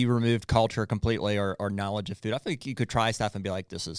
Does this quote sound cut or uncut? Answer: uncut